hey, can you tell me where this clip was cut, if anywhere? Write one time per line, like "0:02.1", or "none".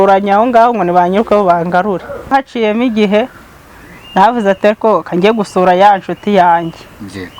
0:02.3